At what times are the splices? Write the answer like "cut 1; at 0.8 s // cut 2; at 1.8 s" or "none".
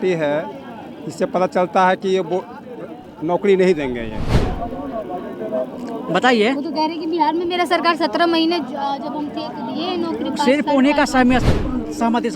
cut 1; at 4.4 s